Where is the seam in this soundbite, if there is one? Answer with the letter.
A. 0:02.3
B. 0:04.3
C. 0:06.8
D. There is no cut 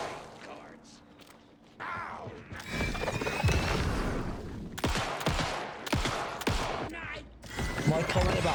D